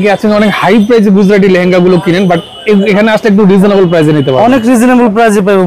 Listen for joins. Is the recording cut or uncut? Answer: uncut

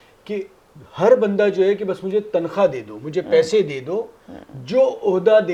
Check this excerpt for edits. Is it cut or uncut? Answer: uncut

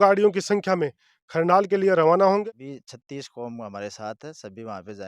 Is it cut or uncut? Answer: cut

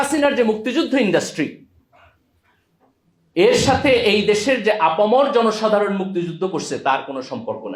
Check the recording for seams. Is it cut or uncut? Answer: uncut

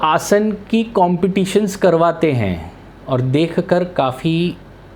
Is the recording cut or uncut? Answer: uncut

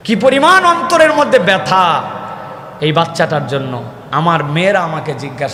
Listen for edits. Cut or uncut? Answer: uncut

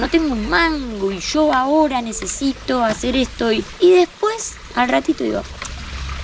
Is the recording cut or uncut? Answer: uncut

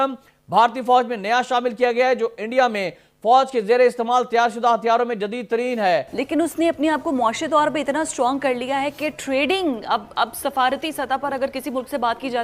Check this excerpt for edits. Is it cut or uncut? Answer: cut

